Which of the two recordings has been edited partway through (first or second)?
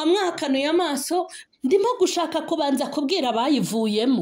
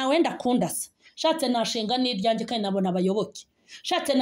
first